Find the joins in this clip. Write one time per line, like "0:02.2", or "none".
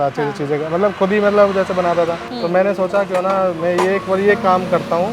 0:02.2